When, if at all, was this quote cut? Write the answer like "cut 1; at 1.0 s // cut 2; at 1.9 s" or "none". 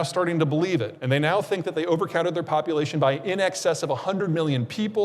cut 1; at 0.9 s